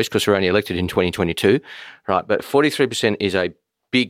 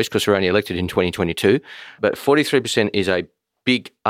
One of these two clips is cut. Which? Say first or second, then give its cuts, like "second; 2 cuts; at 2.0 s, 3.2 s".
second; 1 cut; at 2.0 s